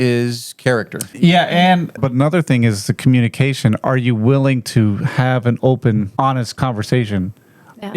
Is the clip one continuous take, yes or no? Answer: no